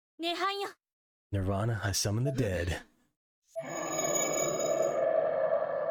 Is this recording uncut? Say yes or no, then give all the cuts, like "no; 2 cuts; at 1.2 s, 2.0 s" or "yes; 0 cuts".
yes; 0 cuts